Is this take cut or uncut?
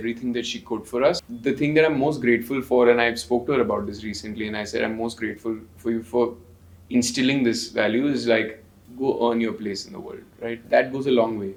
uncut